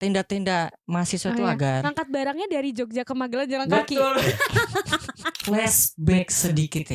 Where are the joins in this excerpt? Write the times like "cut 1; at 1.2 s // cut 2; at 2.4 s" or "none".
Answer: cut 1; at 5.3 s